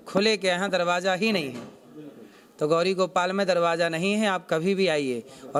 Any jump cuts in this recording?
no; 0 cuts

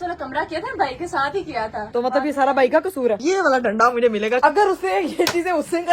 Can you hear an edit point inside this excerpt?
yes; 3 cuts; at 1.9 s, 3.2 s, 4.4 s

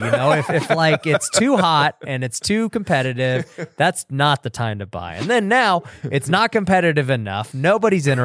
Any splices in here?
no; 0 cuts

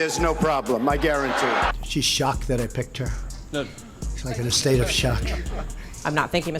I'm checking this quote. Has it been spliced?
yes; 1 cut; at 1.8 s

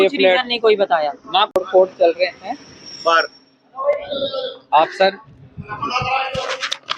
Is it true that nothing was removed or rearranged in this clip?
no; 1 cut; at 1.5 s

